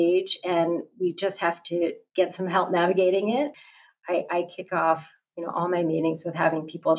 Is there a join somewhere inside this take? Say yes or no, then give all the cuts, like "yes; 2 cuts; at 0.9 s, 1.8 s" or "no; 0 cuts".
yes; 2 cuts; at 2.0 s, 3.5 s